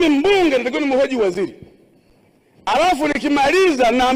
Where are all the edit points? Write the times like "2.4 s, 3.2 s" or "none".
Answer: none